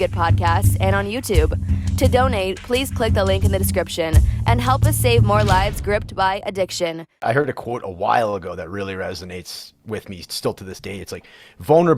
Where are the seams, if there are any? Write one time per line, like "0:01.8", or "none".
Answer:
0:07.2